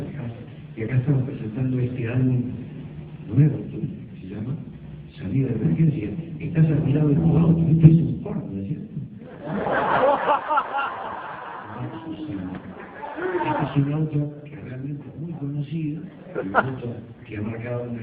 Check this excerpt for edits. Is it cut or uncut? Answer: uncut